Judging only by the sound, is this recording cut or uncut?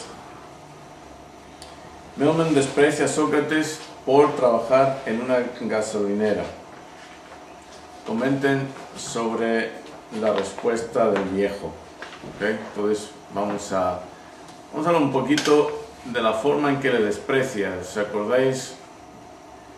uncut